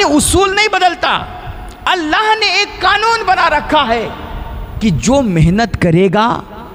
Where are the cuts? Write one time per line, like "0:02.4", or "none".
none